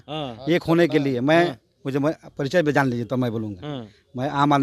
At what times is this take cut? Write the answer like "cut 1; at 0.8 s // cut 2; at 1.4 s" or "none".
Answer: none